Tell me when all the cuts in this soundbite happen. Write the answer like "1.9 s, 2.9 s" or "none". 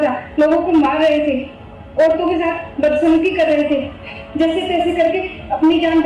none